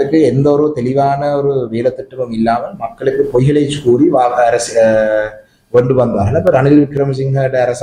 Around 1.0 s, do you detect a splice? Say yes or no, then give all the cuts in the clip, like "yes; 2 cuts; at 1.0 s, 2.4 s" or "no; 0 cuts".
no; 0 cuts